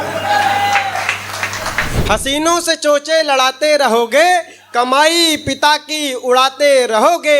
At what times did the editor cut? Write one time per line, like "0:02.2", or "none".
0:01.9